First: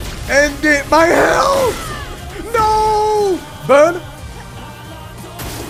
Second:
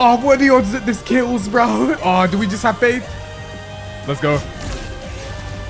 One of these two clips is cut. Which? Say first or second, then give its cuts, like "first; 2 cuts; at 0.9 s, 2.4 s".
second; 1 cut; at 2.0 s